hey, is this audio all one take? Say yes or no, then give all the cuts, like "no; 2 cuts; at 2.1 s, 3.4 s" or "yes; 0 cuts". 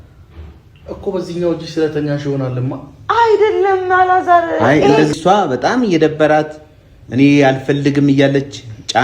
no; 1 cut; at 5.1 s